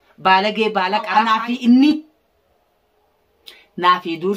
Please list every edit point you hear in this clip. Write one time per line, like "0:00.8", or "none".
0:01.4

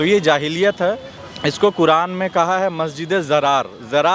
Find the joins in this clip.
0:01.1

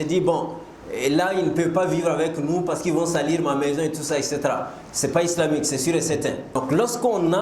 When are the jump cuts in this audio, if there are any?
0:06.5

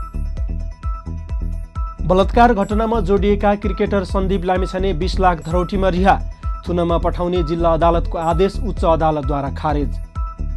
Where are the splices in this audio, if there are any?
none

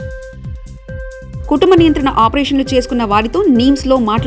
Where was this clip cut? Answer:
0:00.9

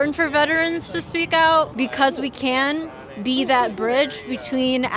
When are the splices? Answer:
0:01.7

